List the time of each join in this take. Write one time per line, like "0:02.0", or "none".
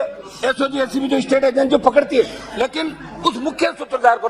none